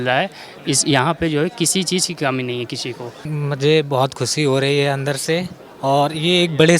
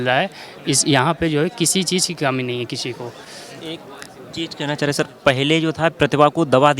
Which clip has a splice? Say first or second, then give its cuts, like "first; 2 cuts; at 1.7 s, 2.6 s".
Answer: first; 1 cut; at 3.3 s